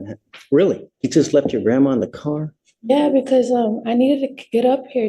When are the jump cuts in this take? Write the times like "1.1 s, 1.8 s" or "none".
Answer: 0.9 s